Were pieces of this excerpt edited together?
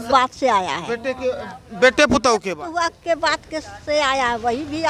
yes; 1 cut; at 2.5 s

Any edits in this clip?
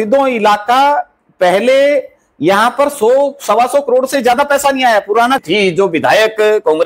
yes; 1 cut; at 5.4 s

